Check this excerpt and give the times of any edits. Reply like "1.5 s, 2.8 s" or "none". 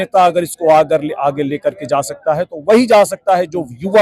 none

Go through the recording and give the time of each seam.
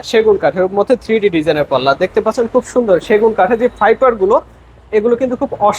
none

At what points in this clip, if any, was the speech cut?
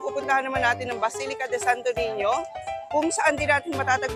none

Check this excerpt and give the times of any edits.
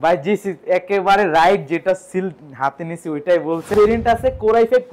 3.7 s

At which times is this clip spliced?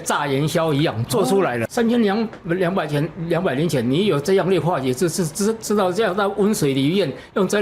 1.7 s

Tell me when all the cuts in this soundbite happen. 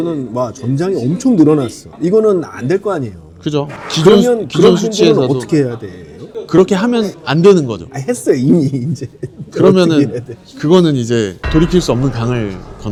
none

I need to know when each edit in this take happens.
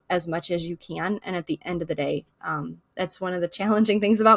none

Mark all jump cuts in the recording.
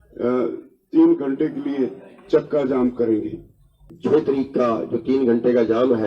3.8 s

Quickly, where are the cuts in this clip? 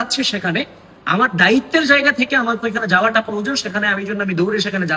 none

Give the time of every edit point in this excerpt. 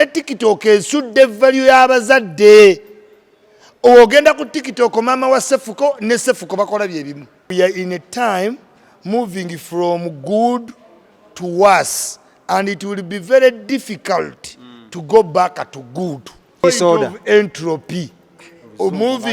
7.5 s, 16.6 s

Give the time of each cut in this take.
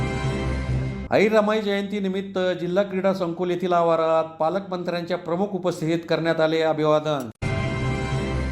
0.9 s

